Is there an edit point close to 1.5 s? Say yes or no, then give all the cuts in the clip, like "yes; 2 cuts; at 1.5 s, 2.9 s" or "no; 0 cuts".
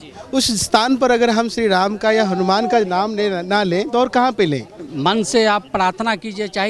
no; 1 cut; at 4.8 s